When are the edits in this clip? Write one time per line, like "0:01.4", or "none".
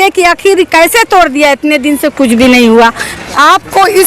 0:03.1